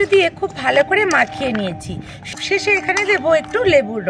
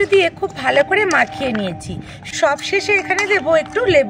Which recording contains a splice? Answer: first; 1 cut; at 2.4 s

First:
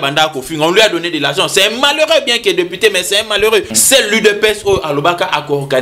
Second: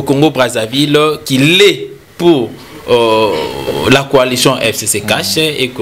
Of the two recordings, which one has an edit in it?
first; 1 cut; at 3.8 s

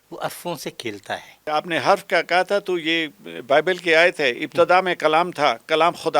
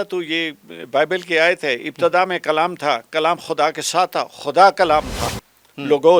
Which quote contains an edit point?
first; 1 cut; at 1.5 s

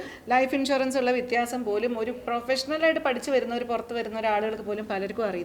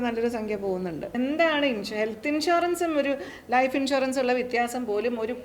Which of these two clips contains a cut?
second; 1 cut; at 1.1 s

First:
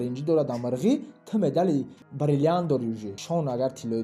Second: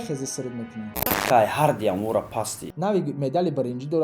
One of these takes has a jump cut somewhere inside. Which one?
second; 2 cuts; at 1.0 s, 2.7 s

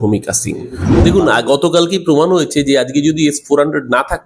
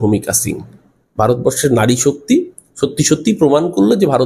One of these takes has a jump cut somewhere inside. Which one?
first; 1 cut; at 1.0 s

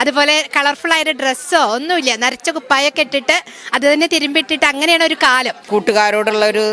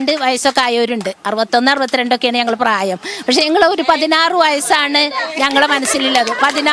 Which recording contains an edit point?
first; 1 cut; at 5.6 s

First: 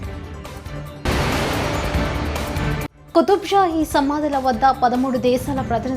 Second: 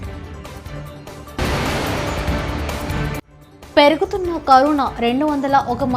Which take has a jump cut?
first; 2 cuts; at 1.0 s, 3.0 s

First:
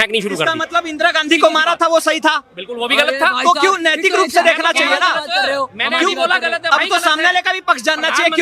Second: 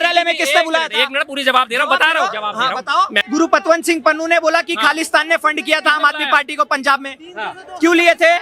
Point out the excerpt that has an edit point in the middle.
second; 1 cut; at 3.2 s

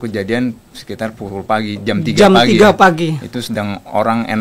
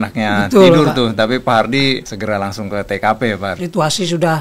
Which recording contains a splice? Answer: second; 2 cuts; at 2.1 s, 3.6 s

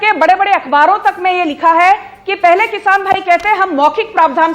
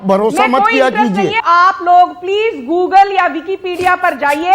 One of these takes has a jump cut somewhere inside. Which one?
second; 1 cut; at 1.4 s

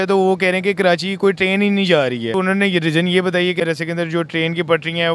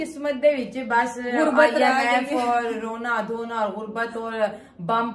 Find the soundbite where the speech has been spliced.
first; 2 cuts; at 2.3 s, 3.6 s

